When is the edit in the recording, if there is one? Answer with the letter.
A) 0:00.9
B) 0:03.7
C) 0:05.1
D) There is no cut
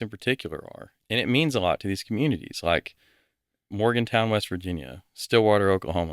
A